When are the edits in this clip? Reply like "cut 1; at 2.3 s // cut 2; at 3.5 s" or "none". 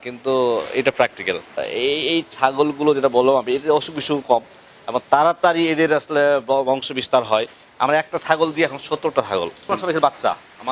cut 1; at 1.6 s // cut 2; at 9.7 s